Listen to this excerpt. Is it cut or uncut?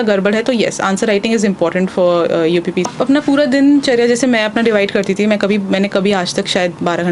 cut